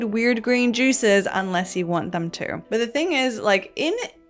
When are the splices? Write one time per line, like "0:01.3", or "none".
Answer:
0:02.5